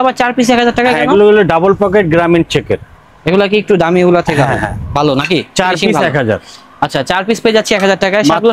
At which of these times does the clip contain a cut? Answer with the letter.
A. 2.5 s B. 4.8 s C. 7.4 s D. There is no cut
D